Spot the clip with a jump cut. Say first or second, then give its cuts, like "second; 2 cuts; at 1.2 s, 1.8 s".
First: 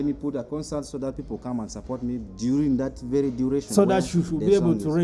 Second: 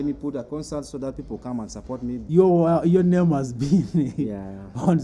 second; 1 cut; at 2.2 s